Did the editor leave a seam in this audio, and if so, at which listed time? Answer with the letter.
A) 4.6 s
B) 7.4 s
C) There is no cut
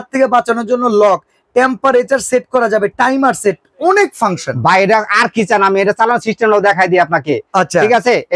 C